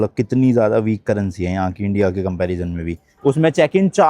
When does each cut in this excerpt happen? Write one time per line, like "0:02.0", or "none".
0:03.0